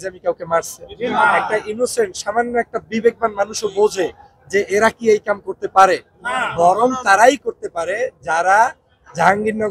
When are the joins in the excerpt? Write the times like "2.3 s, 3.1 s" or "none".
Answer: none